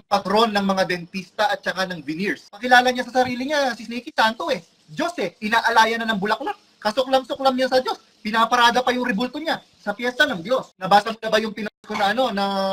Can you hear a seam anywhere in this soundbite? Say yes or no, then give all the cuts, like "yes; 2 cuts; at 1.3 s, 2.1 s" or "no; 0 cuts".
yes; 2 cuts; at 2.6 s, 10.7 s